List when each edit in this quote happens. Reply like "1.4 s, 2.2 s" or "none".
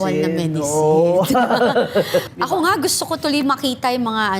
2.3 s